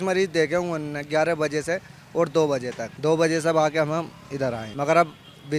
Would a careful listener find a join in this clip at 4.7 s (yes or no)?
yes